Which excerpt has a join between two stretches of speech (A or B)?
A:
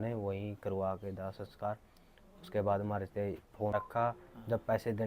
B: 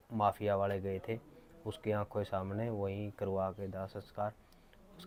A